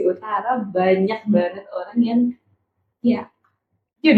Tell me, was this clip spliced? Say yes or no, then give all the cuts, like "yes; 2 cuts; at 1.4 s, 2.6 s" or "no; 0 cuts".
no; 0 cuts